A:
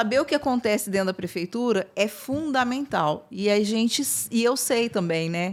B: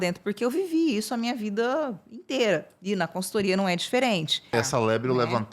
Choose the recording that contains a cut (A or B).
B